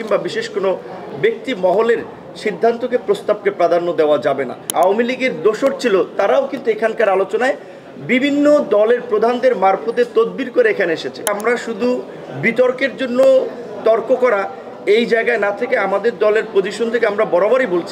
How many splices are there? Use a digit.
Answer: 2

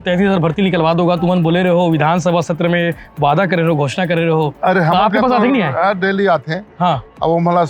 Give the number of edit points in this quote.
0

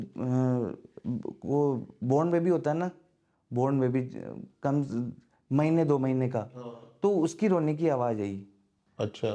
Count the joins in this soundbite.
0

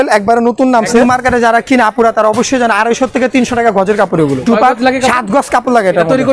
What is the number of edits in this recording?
2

